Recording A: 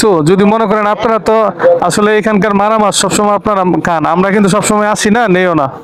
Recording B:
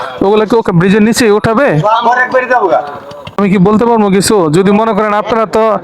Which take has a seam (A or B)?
B